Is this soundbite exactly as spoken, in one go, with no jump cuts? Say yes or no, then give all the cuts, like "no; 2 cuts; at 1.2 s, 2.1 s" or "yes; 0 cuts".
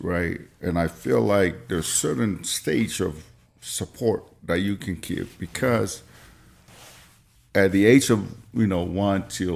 yes; 0 cuts